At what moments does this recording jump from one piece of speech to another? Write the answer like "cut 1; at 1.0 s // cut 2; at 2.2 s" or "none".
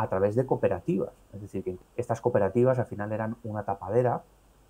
cut 1; at 1.8 s